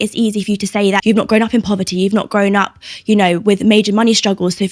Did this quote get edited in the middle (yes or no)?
yes